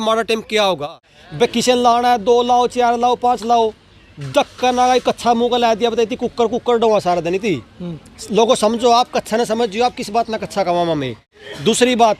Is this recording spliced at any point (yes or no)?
yes